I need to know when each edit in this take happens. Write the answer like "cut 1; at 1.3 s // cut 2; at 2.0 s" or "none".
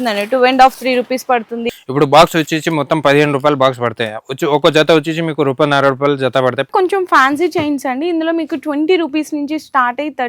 cut 1; at 1.7 s // cut 2; at 6.7 s